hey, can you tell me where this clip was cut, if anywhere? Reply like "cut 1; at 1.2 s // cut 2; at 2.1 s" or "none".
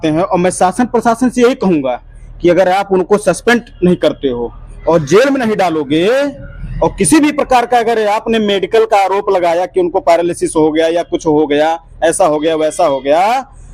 none